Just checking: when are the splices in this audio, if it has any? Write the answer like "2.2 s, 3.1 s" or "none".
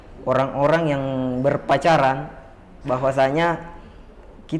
none